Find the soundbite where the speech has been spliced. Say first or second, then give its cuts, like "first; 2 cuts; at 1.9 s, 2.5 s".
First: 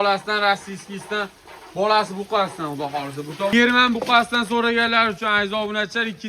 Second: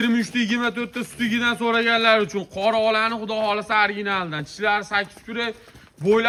first; 1 cut; at 3.5 s